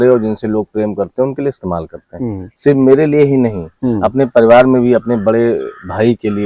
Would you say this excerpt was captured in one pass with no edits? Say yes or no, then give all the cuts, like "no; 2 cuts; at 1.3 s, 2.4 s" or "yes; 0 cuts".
yes; 0 cuts